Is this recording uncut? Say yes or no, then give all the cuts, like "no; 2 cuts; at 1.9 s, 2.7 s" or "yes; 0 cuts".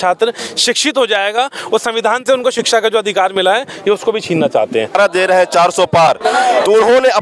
no; 1 cut; at 5.0 s